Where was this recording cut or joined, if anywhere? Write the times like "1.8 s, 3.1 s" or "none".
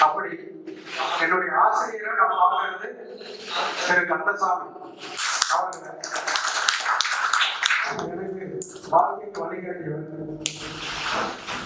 none